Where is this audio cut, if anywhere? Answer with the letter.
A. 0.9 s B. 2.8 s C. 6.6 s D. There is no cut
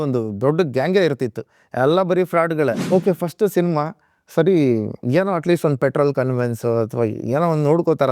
B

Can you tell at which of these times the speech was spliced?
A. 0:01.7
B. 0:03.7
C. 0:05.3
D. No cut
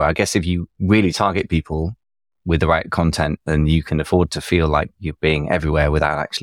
D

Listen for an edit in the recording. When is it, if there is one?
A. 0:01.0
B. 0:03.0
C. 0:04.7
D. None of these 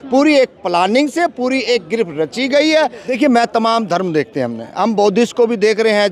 B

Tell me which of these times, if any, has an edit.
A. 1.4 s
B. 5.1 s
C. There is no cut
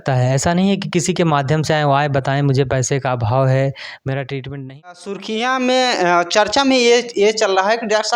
B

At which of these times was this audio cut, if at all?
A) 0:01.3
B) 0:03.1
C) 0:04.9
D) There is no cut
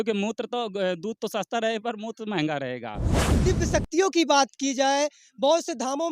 B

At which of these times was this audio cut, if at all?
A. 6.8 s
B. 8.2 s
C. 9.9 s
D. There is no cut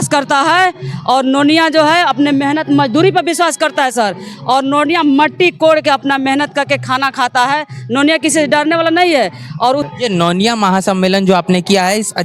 C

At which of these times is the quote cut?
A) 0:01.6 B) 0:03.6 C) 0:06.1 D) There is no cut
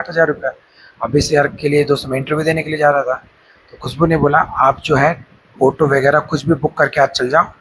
D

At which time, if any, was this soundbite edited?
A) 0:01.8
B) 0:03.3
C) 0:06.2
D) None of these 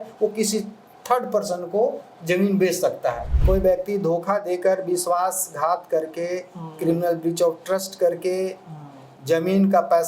B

